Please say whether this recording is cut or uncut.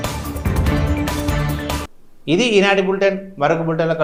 uncut